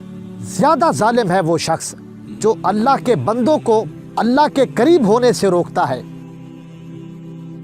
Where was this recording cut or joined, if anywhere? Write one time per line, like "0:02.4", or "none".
0:04.0
0:06.6